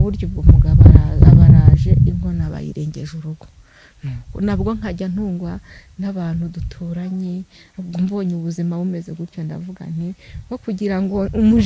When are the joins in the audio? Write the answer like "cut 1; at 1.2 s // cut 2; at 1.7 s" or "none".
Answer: none